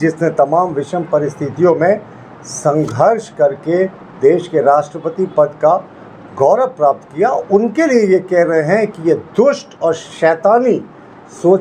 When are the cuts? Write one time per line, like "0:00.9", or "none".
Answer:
none